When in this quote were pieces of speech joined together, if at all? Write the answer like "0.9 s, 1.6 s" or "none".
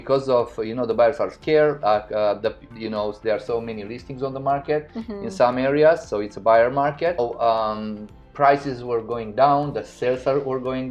7.2 s